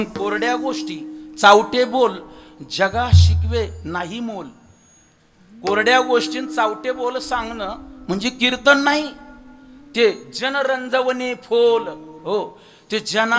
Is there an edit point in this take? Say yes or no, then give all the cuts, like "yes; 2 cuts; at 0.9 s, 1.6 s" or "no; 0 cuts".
no; 0 cuts